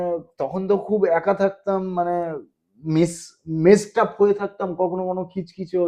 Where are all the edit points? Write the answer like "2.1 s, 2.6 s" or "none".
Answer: none